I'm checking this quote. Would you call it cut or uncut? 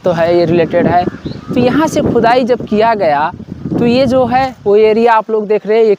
uncut